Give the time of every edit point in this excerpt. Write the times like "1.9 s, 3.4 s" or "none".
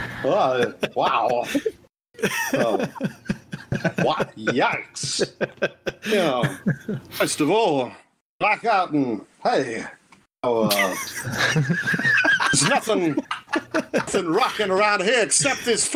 none